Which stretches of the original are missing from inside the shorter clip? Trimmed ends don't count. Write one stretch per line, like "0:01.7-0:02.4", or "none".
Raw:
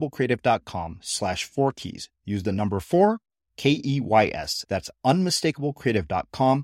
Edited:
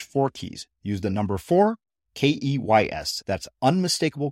none